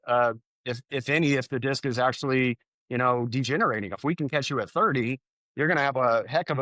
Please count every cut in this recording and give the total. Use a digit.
1